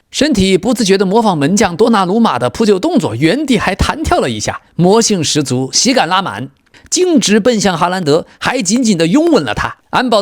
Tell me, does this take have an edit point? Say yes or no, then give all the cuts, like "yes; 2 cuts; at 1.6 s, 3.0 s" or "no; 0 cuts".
yes; 1 cut; at 6.8 s